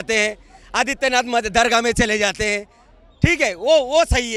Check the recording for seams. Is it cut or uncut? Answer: uncut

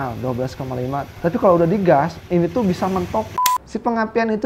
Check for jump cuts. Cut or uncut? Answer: cut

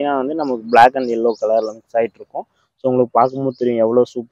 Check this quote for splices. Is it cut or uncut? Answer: uncut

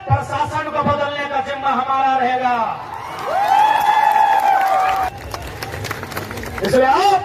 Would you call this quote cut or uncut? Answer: uncut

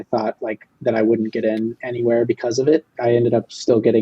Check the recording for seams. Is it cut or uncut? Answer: cut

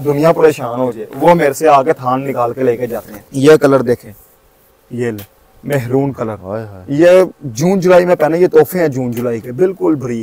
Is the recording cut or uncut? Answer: cut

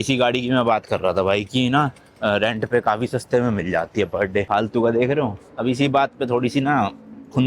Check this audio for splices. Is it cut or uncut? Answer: cut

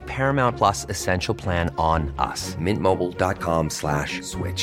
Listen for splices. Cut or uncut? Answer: uncut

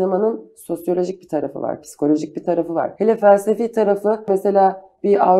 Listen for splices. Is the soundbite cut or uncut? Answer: cut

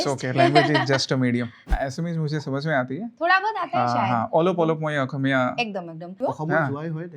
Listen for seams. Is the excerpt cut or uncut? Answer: cut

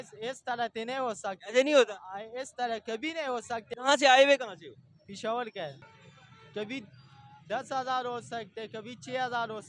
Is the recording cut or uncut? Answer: cut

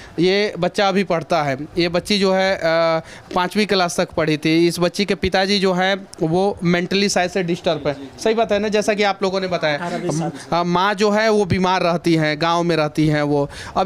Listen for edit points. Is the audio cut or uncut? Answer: uncut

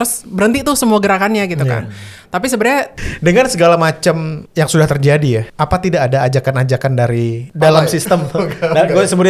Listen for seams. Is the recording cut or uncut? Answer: cut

